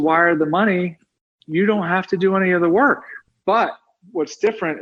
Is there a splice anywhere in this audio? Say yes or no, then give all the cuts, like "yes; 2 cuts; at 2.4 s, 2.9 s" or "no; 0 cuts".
no; 0 cuts